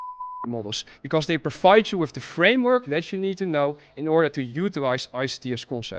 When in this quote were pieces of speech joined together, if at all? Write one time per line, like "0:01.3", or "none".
none